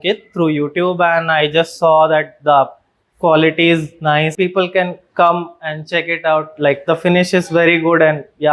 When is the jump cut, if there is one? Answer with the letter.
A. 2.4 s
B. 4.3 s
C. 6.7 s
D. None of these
B